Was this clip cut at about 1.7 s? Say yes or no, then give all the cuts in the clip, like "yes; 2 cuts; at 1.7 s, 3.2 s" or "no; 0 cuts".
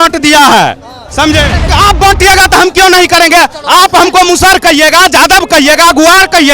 yes; 1 cut; at 1.7 s